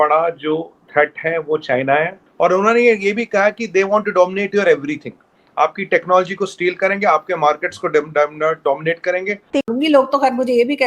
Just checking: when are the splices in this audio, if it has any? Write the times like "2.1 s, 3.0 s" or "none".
2.2 s, 9.6 s